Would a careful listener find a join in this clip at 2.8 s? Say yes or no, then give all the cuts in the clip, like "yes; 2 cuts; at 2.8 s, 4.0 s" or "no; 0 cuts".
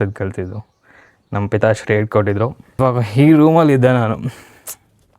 yes; 1 cut; at 2.8 s